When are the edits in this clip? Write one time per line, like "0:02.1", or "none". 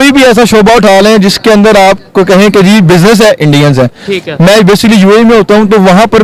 none